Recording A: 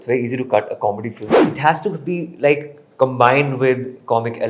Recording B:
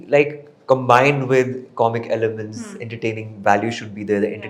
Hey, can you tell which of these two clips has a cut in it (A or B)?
A